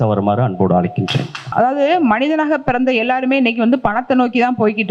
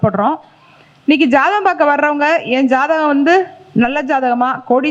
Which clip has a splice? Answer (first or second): first